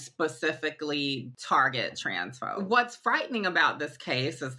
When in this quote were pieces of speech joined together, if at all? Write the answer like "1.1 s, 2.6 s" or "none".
1.3 s, 2.5 s